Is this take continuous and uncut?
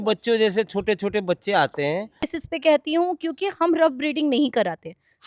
no; 1 cut; at 2.3 s

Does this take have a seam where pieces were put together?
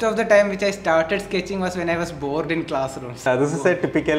yes; 1 cut; at 3.3 s

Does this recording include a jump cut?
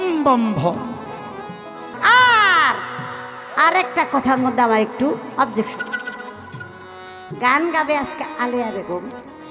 yes; 1 cut; at 1.9 s

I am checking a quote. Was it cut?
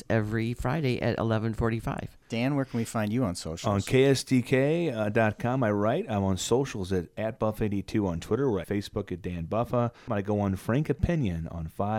yes; 3 cuts; at 2.1 s, 8.6 s, 10.1 s

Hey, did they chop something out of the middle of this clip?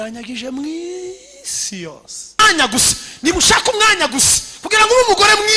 yes; 1 cut; at 2.4 s

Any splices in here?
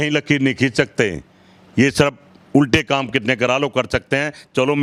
no; 0 cuts

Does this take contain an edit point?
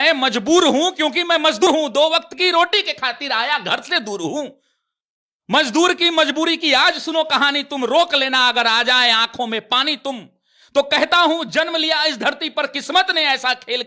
yes; 1 cut; at 1.6 s

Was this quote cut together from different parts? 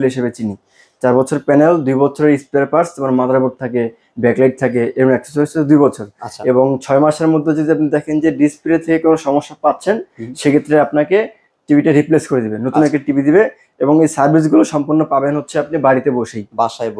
no; 0 cuts

